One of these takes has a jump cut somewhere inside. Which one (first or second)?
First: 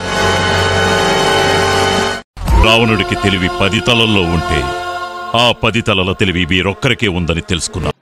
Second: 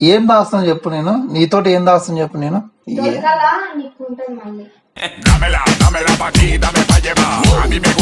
second